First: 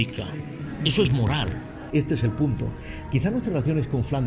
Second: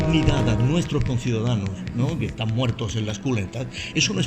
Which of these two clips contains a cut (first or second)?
first